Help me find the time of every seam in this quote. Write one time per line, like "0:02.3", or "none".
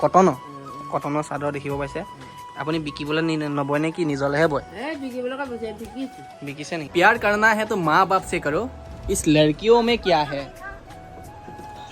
0:06.8